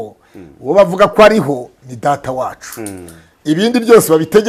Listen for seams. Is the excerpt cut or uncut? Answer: uncut